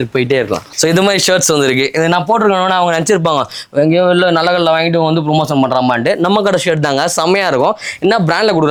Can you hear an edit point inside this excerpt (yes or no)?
no